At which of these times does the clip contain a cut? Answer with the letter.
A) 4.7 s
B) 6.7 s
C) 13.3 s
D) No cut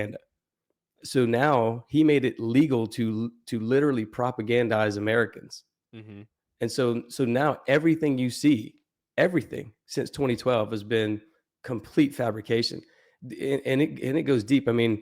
D